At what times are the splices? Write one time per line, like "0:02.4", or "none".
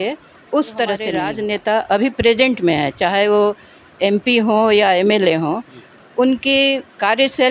0:01.3